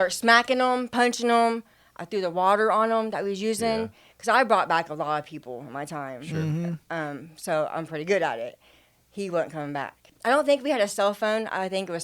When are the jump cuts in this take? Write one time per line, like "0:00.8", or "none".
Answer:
0:10.0